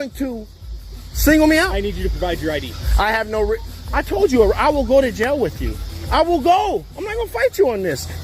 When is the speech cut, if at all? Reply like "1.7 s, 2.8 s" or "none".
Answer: none